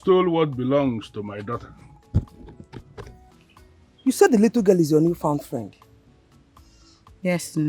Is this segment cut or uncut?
cut